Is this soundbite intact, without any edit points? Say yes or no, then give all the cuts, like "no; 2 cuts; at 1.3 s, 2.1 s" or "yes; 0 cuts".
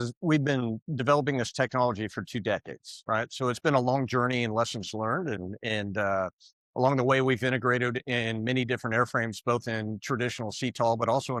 yes; 0 cuts